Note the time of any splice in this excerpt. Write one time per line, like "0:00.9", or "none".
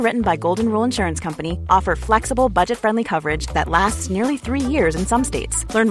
none